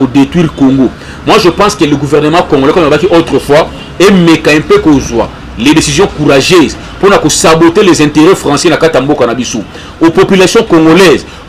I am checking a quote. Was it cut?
no; 0 cuts

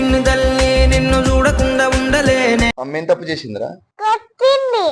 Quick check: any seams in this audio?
yes; 2 cuts; at 2.8 s, 3.8 s

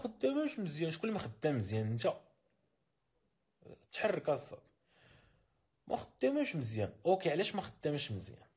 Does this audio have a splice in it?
no; 0 cuts

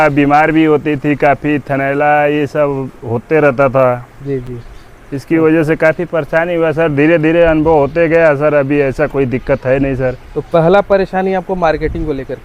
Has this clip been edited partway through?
no; 0 cuts

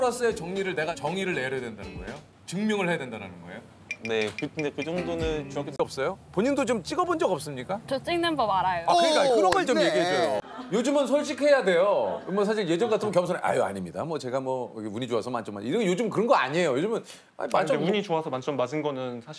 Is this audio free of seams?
no; 3 cuts; at 1.0 s, 5.8 s, 10.4 s

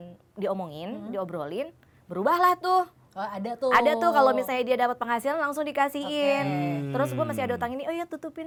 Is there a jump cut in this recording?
no; 0 cuts

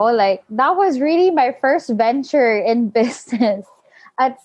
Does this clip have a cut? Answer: no; 0 cuts

